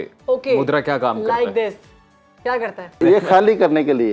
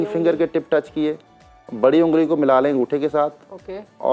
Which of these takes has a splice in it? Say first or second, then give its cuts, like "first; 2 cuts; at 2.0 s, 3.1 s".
first; 1 cut; at 2.9 s